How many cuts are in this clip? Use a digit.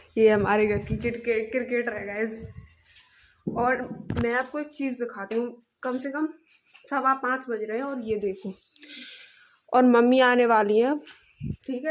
0